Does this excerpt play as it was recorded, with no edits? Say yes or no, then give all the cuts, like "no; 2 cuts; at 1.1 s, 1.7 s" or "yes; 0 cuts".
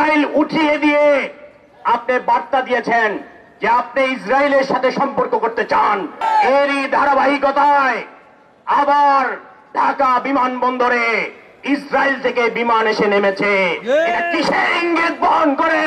no; 1 cut; at 6.2 s